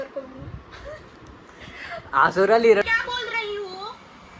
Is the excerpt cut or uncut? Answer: cut